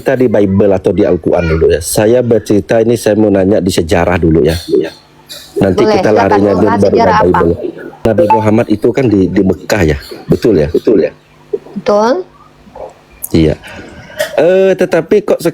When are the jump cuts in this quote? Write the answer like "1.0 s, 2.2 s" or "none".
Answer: 8.0 s